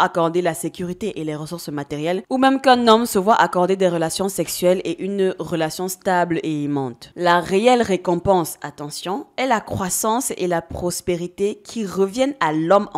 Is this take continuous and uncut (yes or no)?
yes